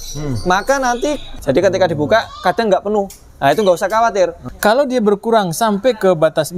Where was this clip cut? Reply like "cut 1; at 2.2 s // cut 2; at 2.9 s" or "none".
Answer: cut 1; at 1.3 s // cut 2; at 4.4 s